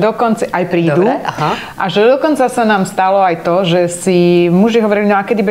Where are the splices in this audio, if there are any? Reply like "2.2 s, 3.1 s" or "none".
none